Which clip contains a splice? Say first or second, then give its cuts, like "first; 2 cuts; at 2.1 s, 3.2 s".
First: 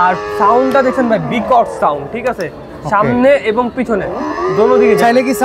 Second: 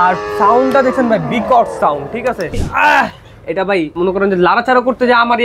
second; 2 cuts; at 2.6 s, 3.9 s